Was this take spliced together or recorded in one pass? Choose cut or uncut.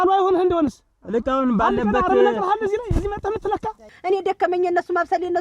cut